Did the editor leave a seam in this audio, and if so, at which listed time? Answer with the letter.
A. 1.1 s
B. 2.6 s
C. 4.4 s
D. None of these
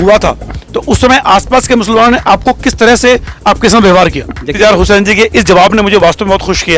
C